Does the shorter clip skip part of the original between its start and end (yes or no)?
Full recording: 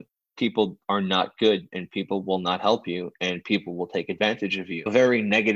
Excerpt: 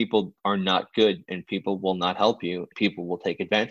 yes